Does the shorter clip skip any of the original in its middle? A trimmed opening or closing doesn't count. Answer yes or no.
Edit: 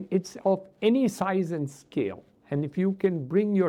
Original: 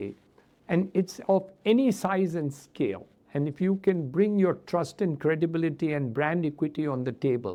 no